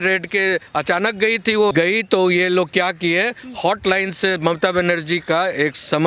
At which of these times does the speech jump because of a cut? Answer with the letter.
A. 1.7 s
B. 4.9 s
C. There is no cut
A